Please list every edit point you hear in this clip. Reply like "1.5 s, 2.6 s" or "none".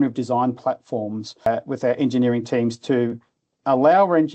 1.5 s